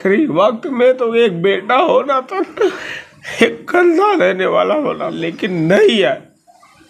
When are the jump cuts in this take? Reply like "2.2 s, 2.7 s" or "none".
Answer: 5.5 s